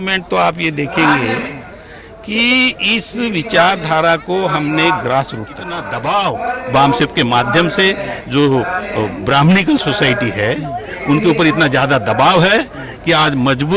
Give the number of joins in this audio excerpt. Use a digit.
1